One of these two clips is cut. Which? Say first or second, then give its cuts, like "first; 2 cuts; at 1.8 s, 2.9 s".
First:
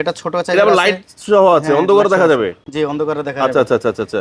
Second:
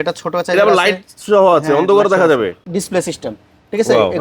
second; 1 cut; at 2.6 s